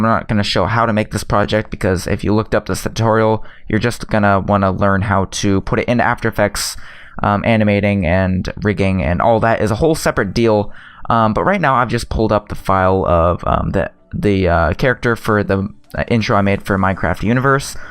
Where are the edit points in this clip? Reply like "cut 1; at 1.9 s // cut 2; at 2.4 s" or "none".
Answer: none